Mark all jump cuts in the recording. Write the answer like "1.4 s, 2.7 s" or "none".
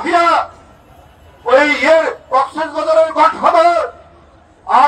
none